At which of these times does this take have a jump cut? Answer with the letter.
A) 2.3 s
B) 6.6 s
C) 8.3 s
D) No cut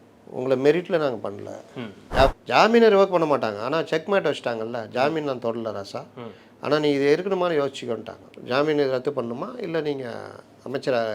A